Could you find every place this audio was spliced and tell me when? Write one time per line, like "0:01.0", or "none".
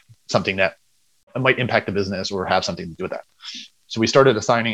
0:01.2